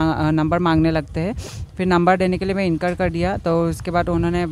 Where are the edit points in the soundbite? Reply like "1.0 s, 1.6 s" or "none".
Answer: none